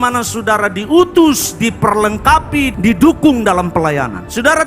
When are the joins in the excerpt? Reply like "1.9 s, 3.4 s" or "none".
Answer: 2.7 s